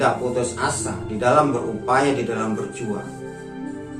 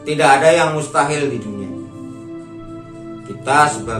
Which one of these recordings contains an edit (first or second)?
second